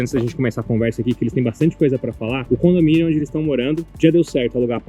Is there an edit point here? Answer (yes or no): yes